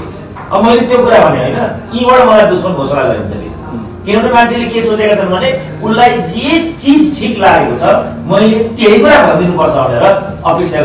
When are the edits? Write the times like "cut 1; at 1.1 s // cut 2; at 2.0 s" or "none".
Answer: none